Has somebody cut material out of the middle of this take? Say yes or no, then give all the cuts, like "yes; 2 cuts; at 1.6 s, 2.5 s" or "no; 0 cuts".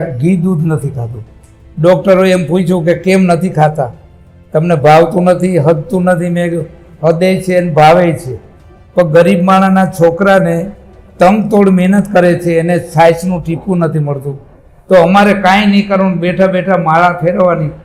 no; 0 cuts